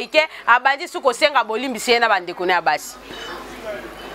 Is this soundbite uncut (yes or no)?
yes